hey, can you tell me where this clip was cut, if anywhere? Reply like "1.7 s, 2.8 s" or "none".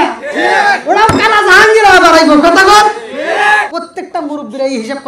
3.7 s

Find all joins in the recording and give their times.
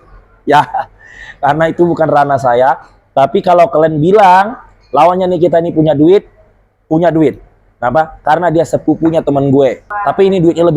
9.9 s

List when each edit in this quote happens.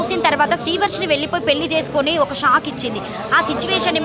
none

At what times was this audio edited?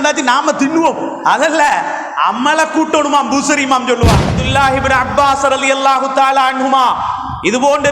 4.4 s

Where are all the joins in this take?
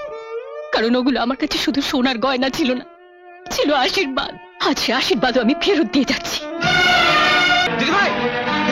7.7 s

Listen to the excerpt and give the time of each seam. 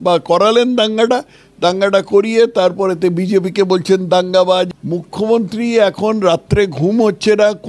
4.8 s

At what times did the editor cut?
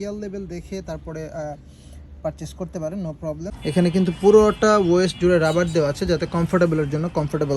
3.5 s

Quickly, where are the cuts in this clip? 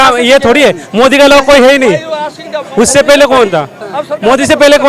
none

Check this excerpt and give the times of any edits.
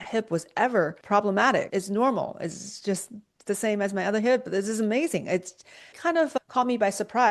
1.0 s, 1.7 s

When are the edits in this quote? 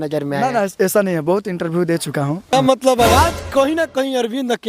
2.5 s

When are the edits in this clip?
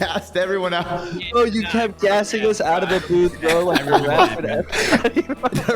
none

